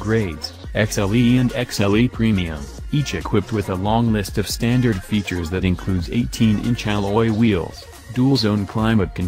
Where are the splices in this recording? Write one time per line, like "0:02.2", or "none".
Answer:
none